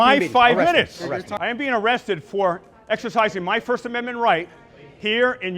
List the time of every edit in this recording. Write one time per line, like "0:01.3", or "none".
0:01.3